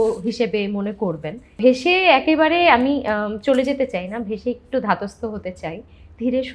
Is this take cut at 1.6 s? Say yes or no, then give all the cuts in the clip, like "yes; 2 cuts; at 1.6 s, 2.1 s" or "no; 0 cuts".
yes; 1 cut; at 1.6 s